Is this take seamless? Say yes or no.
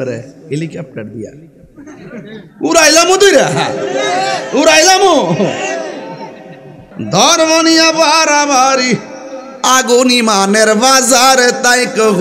no